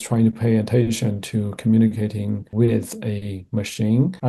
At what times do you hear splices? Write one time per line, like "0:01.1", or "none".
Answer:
0:02.5